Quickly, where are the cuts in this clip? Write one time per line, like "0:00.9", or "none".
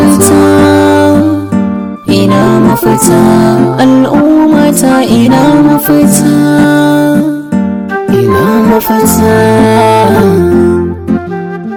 none